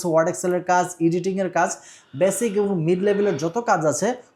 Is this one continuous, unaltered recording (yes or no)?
yes